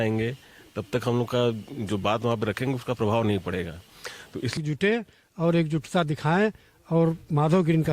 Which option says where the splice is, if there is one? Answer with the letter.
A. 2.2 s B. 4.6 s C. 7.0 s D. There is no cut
B